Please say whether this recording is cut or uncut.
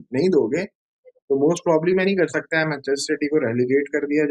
cut